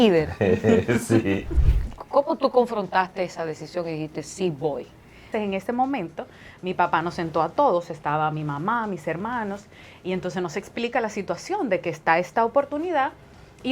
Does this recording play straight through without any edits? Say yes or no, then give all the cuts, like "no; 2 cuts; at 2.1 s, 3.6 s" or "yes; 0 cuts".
no; 2 cuts; at 1.5 s, 5.3 s